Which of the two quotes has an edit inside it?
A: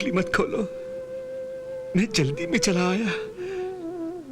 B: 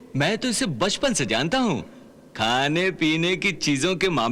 A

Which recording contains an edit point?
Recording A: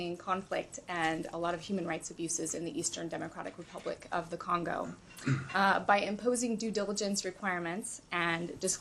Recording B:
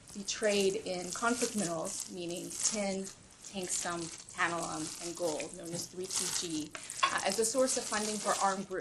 B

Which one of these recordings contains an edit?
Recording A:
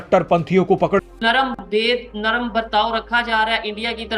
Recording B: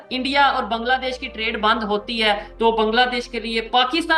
A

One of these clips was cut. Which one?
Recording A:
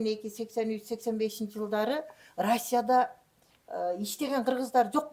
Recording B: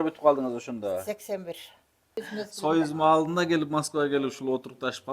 B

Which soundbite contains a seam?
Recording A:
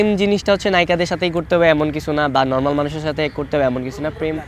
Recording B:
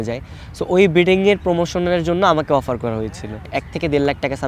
B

